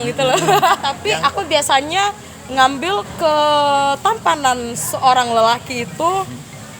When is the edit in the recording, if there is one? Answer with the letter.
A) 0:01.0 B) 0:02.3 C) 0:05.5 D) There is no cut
A